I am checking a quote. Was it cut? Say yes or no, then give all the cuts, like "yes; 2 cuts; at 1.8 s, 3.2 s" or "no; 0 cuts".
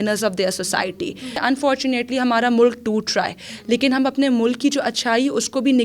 yes; 1 cut; at 1.4 s